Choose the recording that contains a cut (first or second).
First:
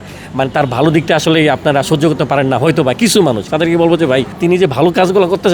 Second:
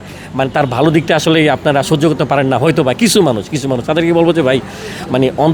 first